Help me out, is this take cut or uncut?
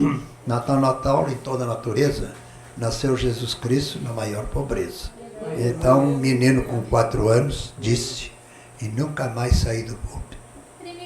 cut